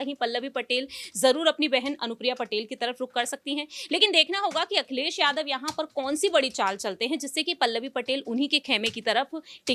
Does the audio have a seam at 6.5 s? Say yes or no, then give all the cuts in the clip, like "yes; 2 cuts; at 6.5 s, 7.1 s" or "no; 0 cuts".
no; 0 cuts